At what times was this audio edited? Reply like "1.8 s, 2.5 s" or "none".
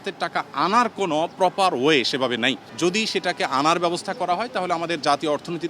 2.6 s